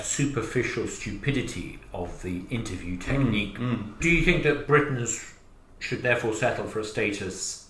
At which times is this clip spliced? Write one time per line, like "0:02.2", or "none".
0:03.9